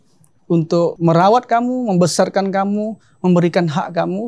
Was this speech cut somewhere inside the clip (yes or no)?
yes